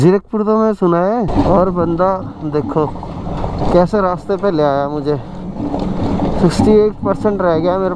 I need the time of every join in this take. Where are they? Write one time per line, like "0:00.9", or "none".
0:01.3